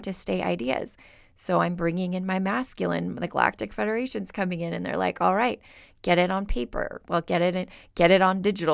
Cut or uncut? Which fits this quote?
uncut